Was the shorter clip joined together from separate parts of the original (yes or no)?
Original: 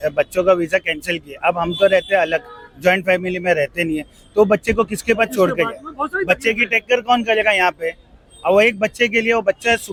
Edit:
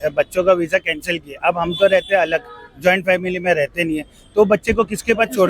no